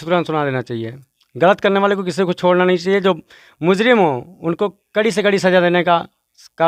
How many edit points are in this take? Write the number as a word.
zero